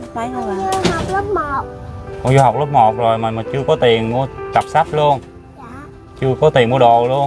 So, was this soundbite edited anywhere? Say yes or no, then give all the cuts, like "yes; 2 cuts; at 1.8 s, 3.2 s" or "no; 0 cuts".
no; 0 cuts